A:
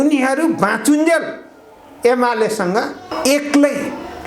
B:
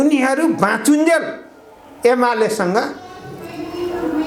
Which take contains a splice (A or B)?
A